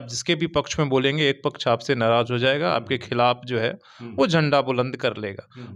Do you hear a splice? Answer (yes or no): no